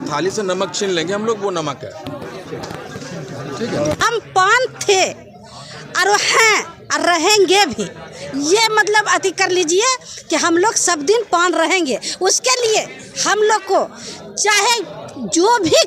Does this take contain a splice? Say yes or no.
yes